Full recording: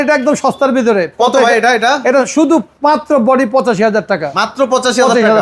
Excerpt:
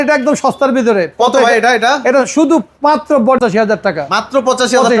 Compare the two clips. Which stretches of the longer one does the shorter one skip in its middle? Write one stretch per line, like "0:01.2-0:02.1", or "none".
0:03.4-0:03.6